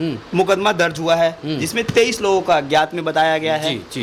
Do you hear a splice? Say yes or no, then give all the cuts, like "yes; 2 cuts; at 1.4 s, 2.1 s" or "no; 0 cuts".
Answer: no; 0 cuts